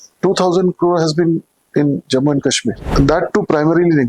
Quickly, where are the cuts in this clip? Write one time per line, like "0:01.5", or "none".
0:02.9